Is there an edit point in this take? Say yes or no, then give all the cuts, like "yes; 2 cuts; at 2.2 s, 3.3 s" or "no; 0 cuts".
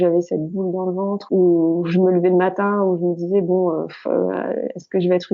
yes; 1 cut; at 1.2 s